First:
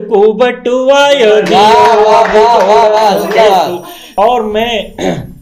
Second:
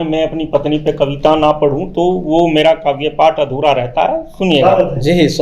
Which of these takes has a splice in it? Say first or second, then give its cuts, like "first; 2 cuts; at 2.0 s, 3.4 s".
first; 1 cut; at 4.0 s